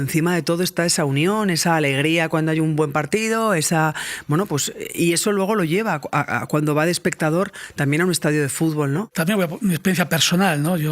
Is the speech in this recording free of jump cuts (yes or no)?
no